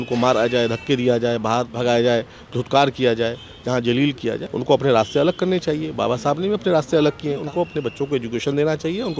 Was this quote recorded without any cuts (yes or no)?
no